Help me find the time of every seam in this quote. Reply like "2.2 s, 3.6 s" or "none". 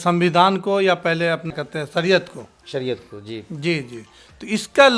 1.5 s